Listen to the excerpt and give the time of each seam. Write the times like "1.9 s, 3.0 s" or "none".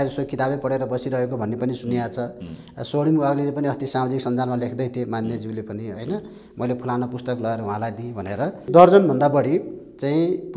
8.7 s